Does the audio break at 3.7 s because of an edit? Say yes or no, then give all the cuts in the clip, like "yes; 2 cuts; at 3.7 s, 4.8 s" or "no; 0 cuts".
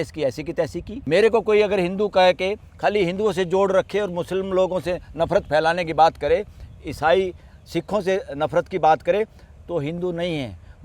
no; 1 cut; at 0.9 s